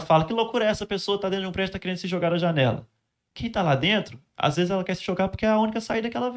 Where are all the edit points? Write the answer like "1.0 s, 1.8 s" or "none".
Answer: none